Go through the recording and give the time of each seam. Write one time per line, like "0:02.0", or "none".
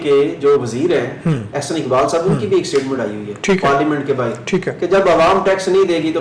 none